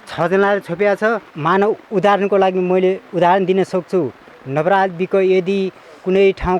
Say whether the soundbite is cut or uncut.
cut